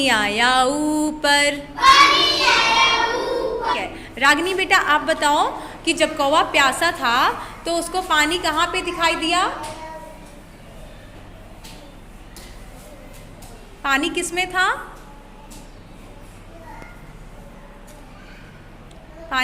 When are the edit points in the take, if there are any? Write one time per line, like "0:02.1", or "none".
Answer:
0:03.8